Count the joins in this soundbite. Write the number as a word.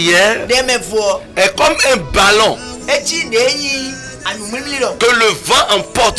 one